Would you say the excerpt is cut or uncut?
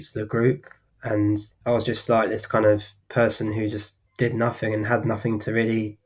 cut